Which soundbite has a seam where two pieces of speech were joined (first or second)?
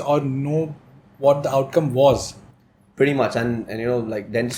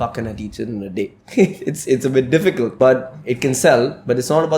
second